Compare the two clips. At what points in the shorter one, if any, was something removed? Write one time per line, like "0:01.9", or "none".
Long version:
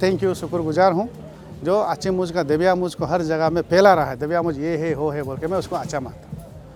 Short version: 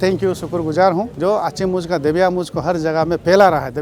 0:01.1